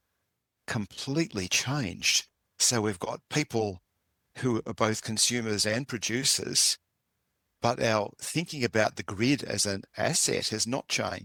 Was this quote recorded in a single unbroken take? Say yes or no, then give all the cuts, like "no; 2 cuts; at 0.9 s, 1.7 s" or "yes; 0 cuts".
yes; 0 cuts